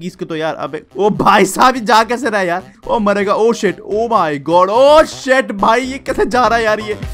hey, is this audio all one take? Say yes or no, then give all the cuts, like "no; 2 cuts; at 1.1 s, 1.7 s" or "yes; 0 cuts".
no; 1 cut; at 2.7 s